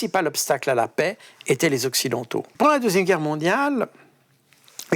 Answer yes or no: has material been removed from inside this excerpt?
yes